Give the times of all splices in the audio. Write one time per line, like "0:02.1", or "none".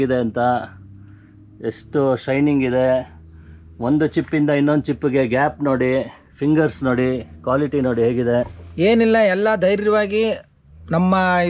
0:08.6